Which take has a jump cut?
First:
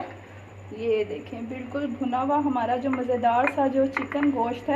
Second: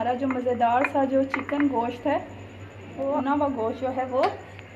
second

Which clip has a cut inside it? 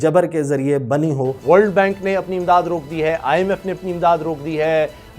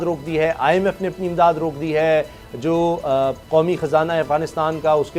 first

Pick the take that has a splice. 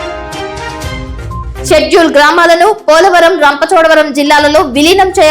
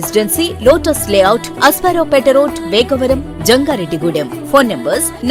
first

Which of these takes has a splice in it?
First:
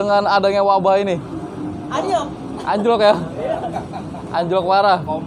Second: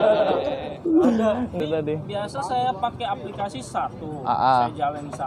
second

